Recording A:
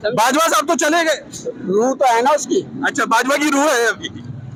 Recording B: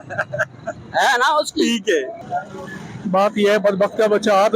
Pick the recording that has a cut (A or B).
B